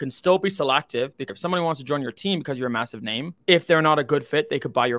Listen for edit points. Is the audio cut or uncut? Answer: cut